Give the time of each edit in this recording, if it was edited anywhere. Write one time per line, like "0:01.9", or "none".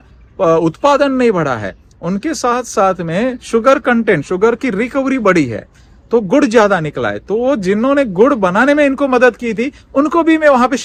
none